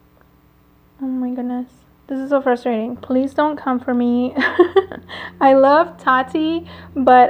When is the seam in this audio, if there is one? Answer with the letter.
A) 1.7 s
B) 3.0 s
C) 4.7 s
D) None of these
B